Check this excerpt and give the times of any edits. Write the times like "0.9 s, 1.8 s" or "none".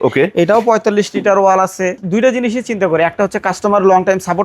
2.0 s